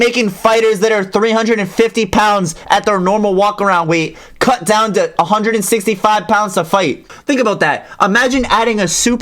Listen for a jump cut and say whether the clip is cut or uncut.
cut